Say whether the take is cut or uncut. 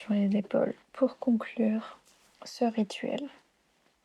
uncut